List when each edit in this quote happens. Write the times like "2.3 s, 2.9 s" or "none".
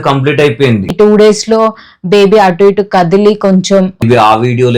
0.9 s, 4.0 s